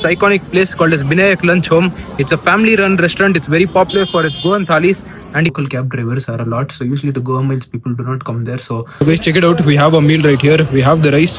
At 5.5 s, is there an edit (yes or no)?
yes